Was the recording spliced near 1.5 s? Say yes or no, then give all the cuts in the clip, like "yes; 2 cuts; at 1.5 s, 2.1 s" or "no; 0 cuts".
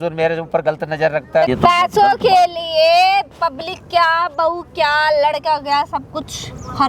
yes; 1 cut; at 1.5 s